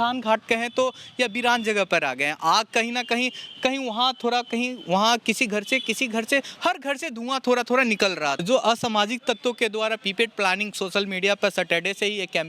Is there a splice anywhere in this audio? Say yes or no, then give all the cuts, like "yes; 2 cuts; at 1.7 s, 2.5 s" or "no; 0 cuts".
yes; 1 cut; at 8.4 s